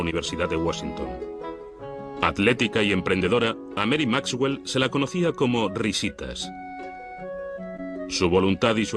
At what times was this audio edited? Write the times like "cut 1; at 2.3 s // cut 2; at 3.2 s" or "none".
none

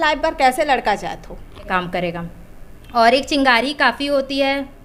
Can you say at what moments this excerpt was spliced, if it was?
cut 1; at 1.7 s

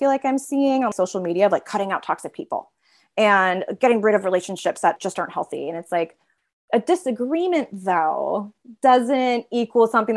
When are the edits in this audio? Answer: cut 1; at 0.9 s // cut 2; at 4.9 s

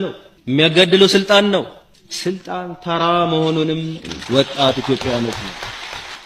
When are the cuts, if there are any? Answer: cut 1; at 3.9 s

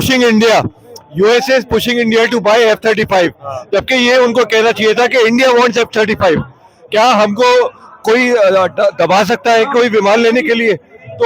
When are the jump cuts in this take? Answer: none

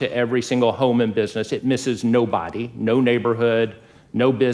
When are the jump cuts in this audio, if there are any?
none

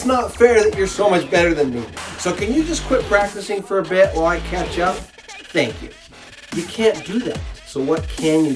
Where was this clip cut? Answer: cut 1; at 7.5 s

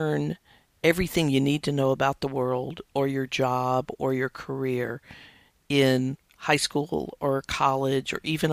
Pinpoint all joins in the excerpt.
none

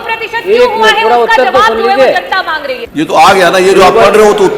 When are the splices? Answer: cut 1; at 2.7 s

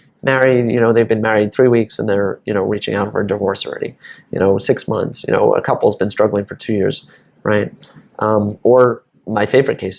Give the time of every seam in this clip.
none

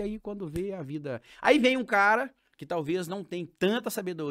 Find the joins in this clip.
none

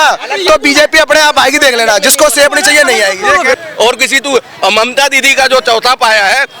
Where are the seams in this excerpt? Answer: cut 1; at 3.6 s

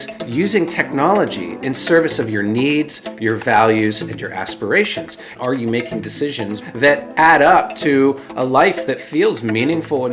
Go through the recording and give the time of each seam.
cut 1; at 5.3 s // cut 2; at 6.6 s

